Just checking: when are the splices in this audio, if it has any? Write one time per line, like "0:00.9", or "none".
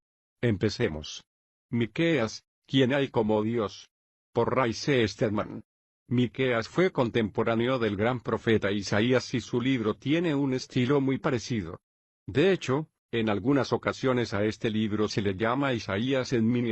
0:07.1